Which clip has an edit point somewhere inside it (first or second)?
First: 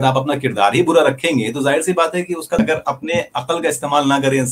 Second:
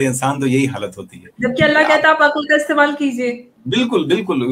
first